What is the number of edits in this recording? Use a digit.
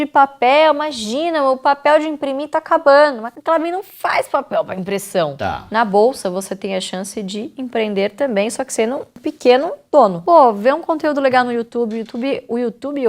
2